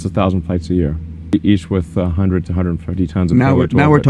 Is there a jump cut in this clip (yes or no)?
yes